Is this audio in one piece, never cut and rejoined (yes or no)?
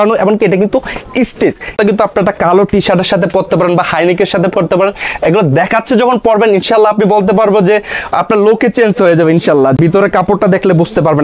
no